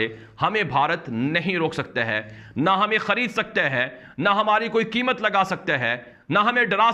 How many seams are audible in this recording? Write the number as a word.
zero